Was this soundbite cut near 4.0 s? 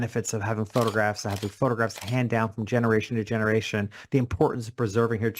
no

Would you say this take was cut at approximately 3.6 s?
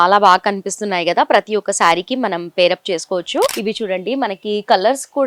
yes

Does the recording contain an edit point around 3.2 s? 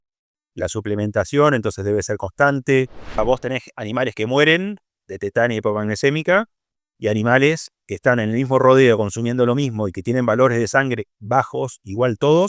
yes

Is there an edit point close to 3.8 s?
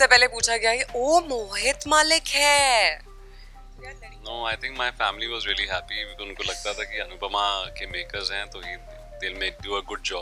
no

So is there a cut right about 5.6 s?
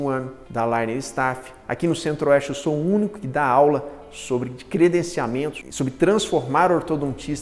yes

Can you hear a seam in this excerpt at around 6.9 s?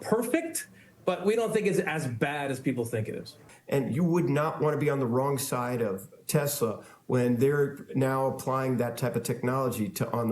no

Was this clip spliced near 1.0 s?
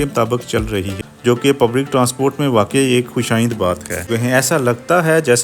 yes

